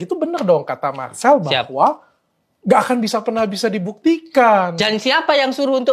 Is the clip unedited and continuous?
yes; 0 cuts

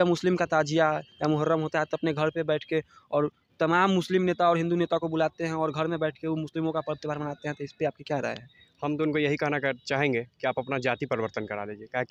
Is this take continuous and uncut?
yes; 0 cuts

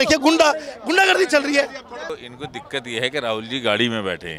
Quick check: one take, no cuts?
no; 1 cut; at 2.1 s

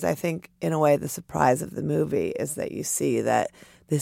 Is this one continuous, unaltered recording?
yes; 0 cuts

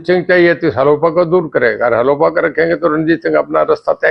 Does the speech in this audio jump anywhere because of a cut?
no; 0 cuts

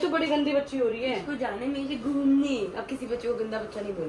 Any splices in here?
no; 0 cuts

